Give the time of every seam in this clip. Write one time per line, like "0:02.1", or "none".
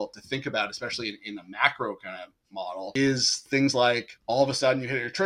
0:02.9
0:04.1

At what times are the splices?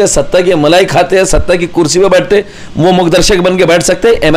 none

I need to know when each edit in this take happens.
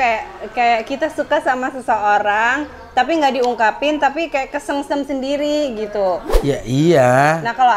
0:06.3

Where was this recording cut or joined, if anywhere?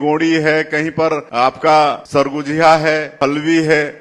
0:01.3
0:02.0
0:03.2

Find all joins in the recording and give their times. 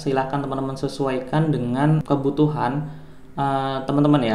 0:02.0

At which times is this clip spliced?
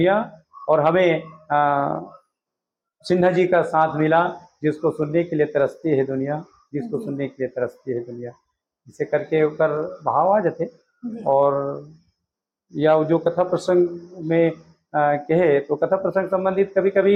none

